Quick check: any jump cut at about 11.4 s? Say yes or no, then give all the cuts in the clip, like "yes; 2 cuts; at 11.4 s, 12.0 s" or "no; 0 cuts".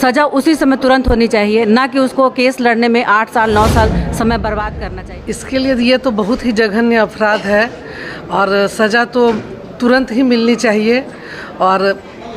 no; 1 cut; at 4.8 s